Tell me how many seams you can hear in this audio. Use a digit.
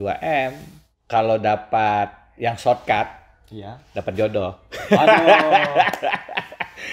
1